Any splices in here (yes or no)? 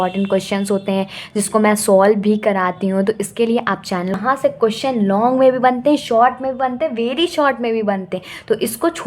yes